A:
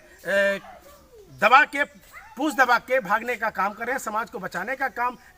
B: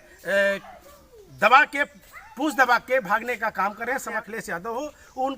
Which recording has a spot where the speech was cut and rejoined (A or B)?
B